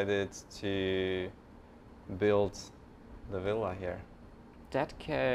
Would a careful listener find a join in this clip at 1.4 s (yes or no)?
no